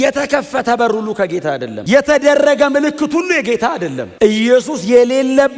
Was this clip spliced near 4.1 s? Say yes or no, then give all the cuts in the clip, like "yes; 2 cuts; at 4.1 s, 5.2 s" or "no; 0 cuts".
yes; 1 cut; at 4.1 s